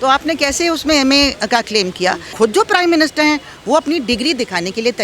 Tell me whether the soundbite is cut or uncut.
cut